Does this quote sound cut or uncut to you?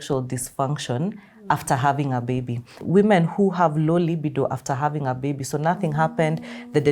cut